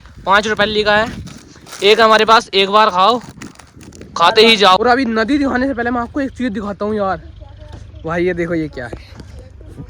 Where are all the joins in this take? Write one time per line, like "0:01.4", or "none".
0:04.8